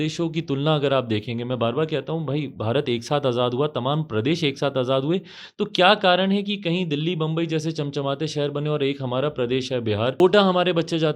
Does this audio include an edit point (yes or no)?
yes